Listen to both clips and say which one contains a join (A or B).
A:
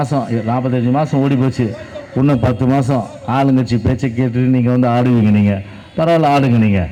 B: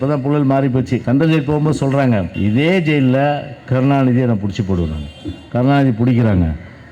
B